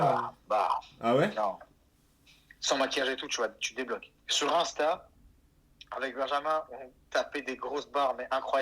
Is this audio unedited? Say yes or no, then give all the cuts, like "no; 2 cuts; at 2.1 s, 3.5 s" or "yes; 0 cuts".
no; 1 cut; at 4.1 s